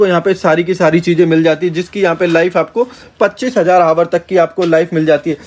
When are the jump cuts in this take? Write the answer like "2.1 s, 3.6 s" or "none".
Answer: none